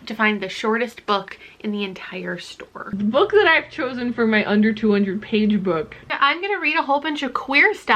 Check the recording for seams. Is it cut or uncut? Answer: cut